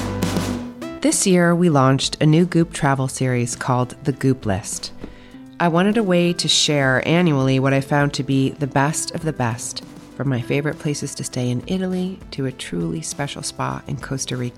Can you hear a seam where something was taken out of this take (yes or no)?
yes